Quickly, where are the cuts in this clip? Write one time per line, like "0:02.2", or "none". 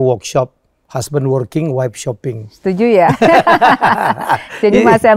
none